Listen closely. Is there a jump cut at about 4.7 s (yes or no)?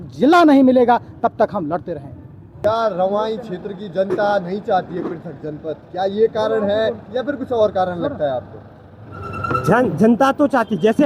no